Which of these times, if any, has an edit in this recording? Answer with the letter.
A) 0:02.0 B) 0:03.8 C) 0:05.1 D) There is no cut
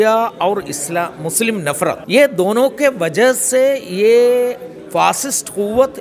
A